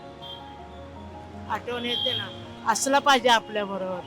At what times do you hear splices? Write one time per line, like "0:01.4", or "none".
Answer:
0:02.4